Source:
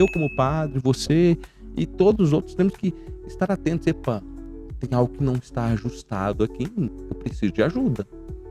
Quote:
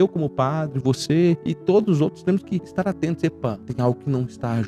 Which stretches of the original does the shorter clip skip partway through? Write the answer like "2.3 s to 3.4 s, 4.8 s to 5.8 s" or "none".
1.5 s to 1.8 s, 3.0 s to 3.3 s, 4.3 s to 4.8 s